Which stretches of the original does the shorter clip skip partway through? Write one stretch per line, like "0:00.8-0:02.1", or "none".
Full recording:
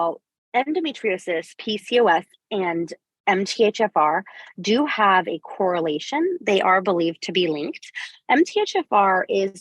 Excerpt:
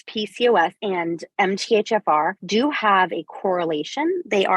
0:02.5-0:02.9
0:04.3-0:04.5